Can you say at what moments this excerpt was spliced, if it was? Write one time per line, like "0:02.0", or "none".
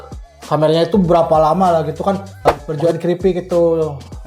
0:02.6